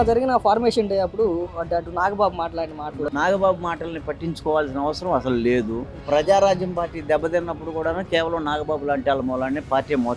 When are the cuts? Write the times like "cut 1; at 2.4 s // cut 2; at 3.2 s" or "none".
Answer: cut 1; at 3.1 s // cut 2; at 6.0 s